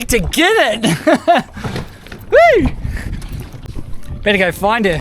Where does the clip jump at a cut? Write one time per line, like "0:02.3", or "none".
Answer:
0:03.7